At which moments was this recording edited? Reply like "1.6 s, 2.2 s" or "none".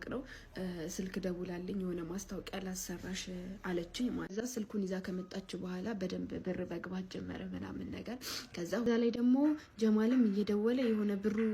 4.3 s, 8.8 s